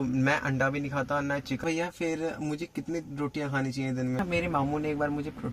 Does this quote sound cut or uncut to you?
cut